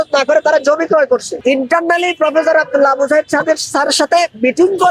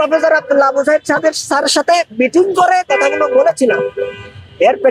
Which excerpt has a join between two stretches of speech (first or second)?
first